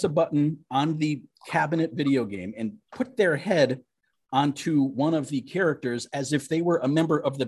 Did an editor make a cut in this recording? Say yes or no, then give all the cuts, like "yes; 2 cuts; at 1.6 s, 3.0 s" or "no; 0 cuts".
no; 0 cuts